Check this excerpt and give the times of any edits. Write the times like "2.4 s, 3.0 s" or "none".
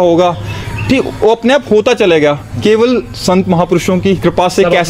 none